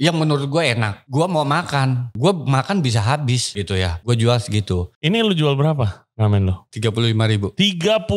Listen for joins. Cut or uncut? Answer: cut